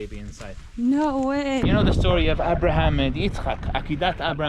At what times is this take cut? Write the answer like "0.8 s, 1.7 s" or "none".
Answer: 1.6 s